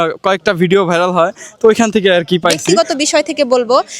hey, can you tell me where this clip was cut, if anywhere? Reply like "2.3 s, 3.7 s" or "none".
2.8 s